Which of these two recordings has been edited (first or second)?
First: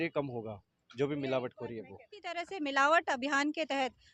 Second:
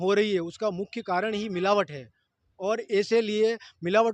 first